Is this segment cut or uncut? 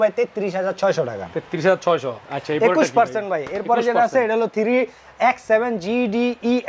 uncut